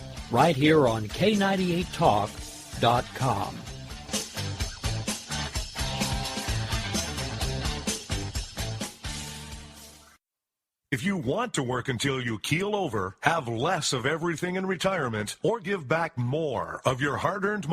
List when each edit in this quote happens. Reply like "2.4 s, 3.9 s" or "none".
10.3 s